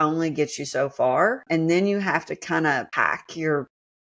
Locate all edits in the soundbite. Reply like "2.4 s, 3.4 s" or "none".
1.4 s, 2.9 s